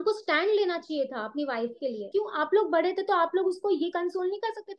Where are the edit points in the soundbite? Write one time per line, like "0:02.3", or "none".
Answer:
0:02.0